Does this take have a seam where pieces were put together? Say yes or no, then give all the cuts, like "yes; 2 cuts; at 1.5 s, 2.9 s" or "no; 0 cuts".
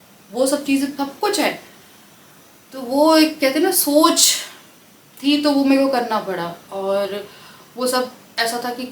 no; 0 cuts